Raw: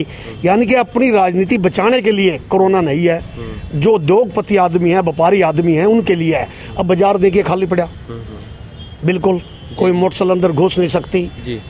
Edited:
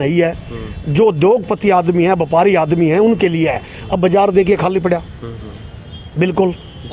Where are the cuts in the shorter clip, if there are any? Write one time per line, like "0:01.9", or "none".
none